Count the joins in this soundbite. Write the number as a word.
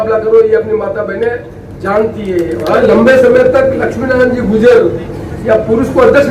one